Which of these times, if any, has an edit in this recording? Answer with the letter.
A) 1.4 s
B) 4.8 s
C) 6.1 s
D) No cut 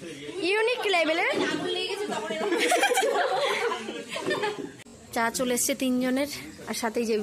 B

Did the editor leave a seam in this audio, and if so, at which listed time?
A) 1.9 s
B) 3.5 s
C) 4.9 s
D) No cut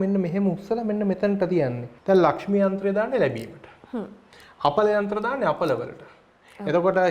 A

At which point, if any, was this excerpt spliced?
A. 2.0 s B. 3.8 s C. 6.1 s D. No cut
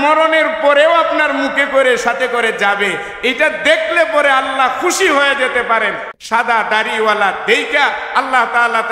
C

